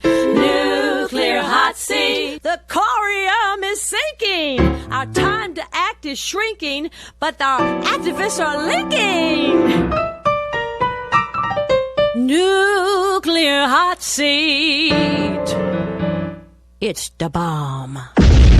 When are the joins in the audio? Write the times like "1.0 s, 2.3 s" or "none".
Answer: none